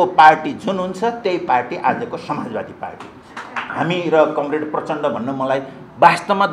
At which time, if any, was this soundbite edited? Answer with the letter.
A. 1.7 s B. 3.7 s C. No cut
B